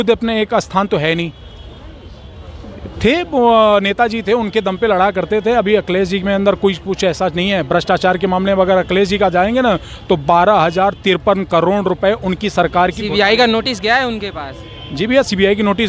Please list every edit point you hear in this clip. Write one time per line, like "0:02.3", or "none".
none

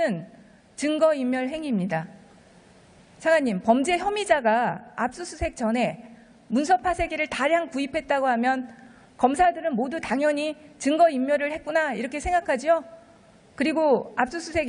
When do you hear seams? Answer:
0:11.4

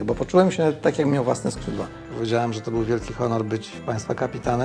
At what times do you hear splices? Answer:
0:02.0
0:03.7

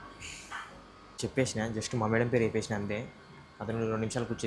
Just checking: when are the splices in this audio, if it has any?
0:01.3

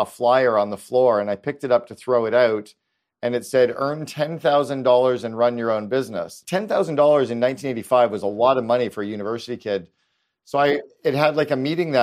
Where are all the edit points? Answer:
0:06.3

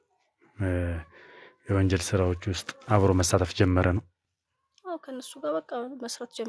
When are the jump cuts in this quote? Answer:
none

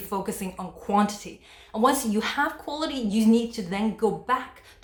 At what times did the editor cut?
none

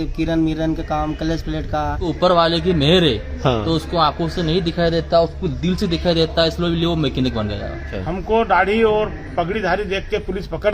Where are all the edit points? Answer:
0:02.1
0:08.0

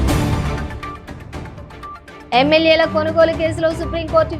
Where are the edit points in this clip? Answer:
0:02.2

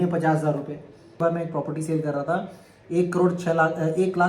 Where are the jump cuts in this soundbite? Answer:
0:01.2

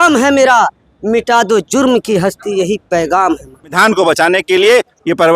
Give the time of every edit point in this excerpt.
0:03.8

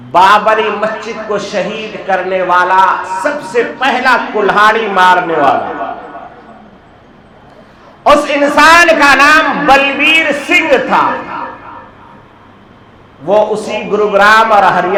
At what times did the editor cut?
none

